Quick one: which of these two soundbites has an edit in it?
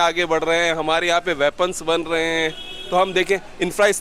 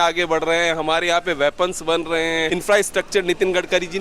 second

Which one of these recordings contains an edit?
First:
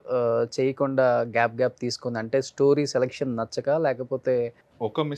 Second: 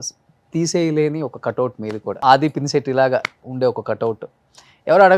second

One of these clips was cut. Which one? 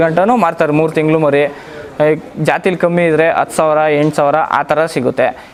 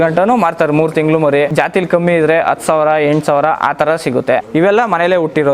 second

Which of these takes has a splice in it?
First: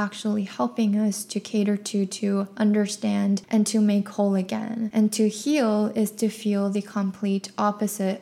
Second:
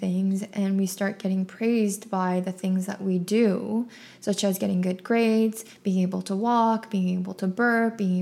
first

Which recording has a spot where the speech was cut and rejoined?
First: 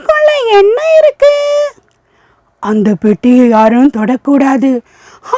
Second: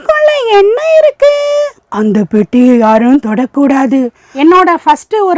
second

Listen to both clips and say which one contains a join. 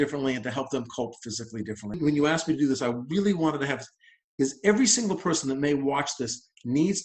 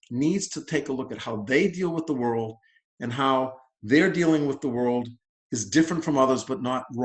first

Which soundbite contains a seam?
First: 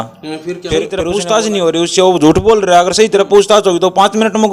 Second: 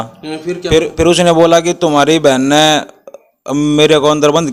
first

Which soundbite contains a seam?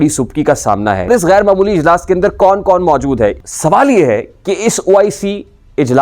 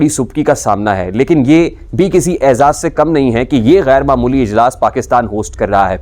first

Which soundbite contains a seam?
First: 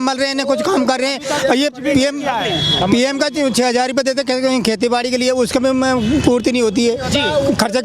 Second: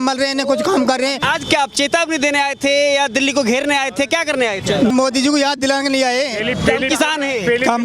second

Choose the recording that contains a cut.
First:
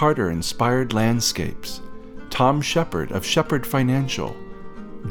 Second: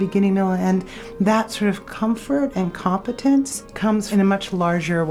second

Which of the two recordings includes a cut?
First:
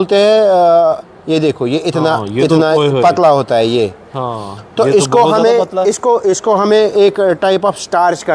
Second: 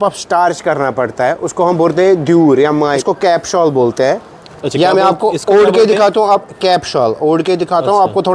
second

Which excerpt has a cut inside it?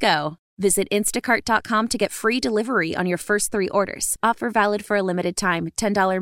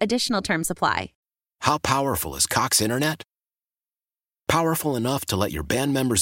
second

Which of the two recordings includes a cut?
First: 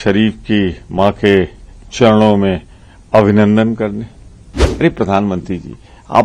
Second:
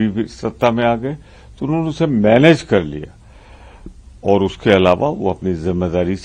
first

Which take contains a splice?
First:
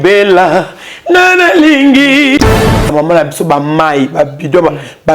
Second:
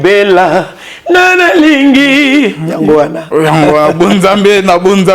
first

